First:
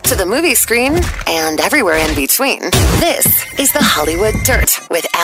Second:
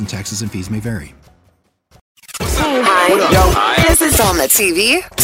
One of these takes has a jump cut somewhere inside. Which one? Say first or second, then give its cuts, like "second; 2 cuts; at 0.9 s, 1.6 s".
second; 1 cut; at 2.1 s